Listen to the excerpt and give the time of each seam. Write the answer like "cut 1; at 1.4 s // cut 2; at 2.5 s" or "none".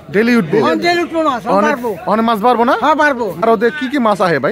cut 1; at 3.4 s